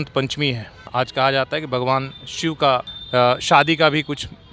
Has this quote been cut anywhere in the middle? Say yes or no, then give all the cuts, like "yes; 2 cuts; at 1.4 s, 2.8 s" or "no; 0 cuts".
yes; 2 cuts; at 0.8 s, 3.0 s